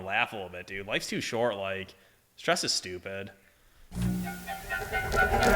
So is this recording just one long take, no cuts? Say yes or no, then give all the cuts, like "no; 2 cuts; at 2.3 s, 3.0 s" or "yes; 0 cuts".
no; 1 cut; at 4.0 s